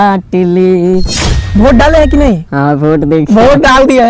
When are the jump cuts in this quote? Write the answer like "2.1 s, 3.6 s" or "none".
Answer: 1.5 s

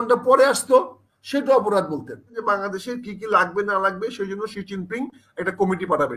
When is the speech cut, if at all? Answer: 2.3 s

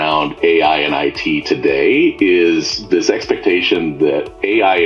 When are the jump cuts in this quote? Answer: none

